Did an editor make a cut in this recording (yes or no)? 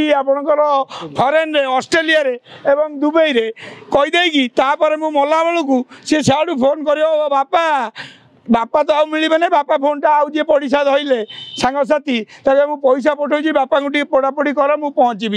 no